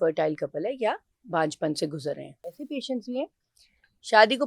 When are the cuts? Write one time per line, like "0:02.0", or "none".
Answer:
0:02.6